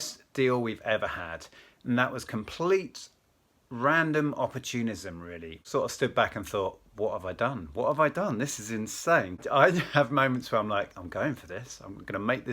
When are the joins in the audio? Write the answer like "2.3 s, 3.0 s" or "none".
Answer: 5.5 s, 9.4 s